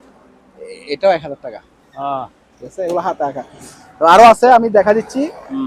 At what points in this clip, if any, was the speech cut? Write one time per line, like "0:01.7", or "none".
none